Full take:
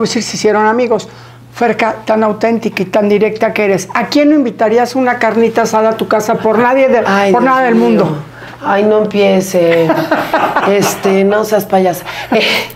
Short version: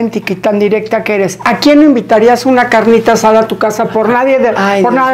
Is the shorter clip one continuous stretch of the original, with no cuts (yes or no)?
yes